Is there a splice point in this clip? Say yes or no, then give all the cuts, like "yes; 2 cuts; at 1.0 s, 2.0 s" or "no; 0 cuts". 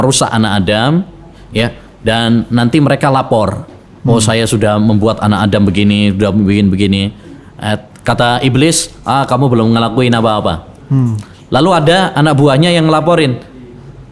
no; 0 cuts